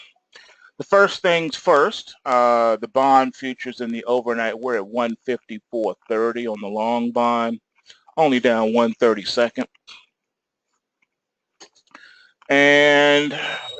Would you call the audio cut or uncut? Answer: cut